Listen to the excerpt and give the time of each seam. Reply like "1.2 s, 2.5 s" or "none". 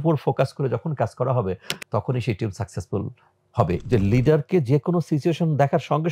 3.8 s